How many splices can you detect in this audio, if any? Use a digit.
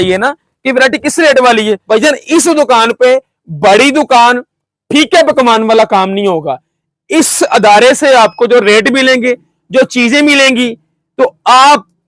1